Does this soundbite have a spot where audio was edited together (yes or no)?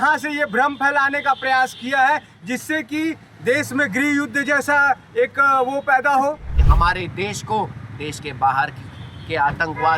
yes